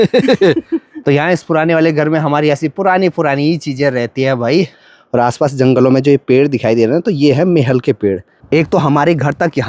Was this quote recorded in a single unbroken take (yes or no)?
no